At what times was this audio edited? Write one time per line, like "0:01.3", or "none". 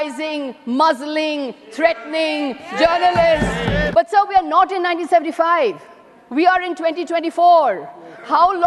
0:03.9